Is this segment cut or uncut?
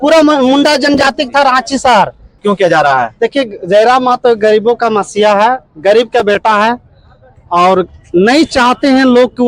cut